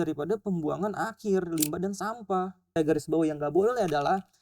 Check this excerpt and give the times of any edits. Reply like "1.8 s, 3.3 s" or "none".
2.6 s